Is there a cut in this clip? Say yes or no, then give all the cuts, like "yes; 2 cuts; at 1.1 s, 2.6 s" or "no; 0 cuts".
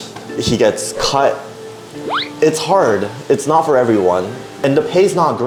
no; 0 cuts